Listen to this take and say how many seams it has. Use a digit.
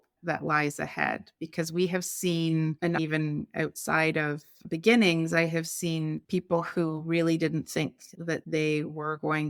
0